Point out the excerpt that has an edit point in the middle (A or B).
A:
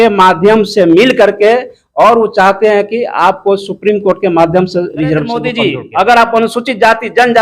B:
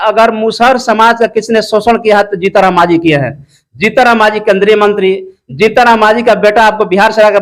A